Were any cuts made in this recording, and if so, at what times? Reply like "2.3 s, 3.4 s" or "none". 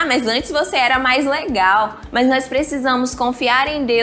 2.0 s